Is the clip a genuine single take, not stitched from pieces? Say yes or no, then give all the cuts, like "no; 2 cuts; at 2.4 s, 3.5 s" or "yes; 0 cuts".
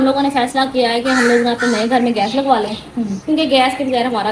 yes; 0 cuts